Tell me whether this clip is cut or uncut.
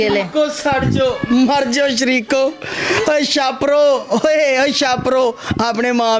uncut